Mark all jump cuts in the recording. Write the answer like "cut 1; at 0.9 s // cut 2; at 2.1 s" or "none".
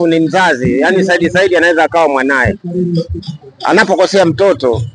none